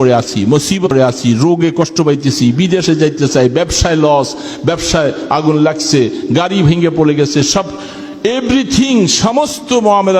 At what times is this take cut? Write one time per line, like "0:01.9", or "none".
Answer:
0:00.9